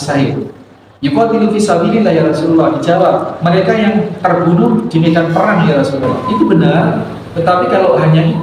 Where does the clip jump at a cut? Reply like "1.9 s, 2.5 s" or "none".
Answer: 6.2 s